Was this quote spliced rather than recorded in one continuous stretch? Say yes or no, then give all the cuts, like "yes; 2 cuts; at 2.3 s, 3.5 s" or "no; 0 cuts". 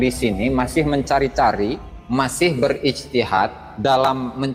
yes; 1 cut; at 1.9 s